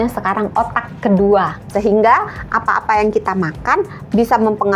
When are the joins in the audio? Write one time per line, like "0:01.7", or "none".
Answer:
0:01.7